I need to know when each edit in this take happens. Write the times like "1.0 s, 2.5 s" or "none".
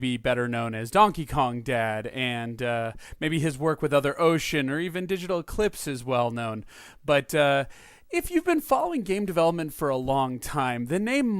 9.5 s

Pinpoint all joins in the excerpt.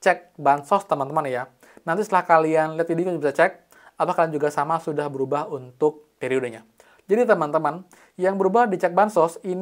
none

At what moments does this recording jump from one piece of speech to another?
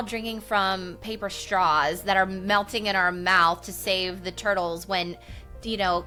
none

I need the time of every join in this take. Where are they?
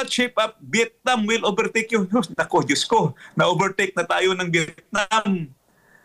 none

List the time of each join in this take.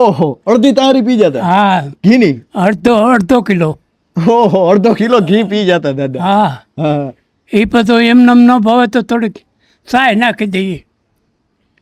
none

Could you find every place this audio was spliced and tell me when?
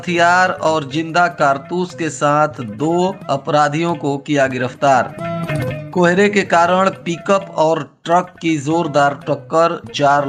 none

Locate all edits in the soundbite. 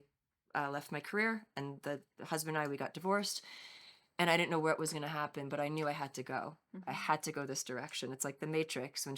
none

